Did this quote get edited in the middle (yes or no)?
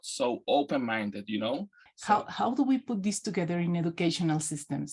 yes